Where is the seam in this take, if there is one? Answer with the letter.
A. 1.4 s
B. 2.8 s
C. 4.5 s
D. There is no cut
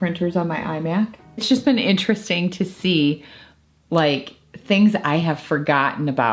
A